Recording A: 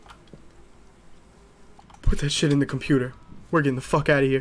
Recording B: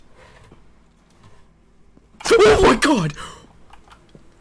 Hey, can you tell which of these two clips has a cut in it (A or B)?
A